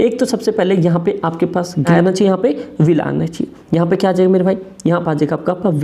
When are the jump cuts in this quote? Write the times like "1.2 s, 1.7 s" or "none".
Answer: 1.7 s